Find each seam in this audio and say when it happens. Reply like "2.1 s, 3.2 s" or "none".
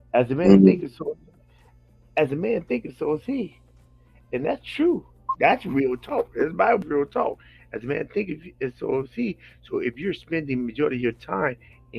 6.8 s